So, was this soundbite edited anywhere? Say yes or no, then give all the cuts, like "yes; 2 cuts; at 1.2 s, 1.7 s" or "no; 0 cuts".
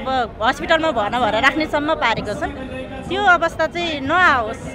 no; 0 cuts